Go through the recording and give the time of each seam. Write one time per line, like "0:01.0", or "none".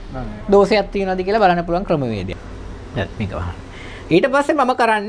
0:02.3